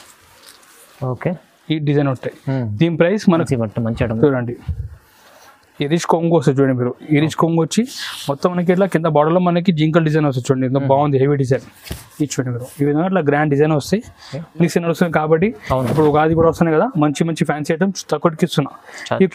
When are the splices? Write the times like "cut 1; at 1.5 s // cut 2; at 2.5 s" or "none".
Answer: cut 1; at 3.4 s // cut 2; at 14.6 s